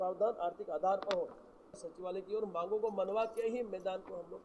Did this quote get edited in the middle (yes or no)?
yes